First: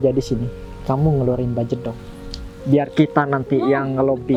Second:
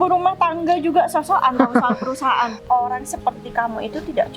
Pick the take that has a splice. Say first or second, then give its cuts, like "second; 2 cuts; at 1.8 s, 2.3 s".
second; 1 cut; at 2.5 s